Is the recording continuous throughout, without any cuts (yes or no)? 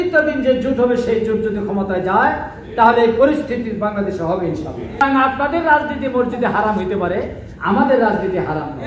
no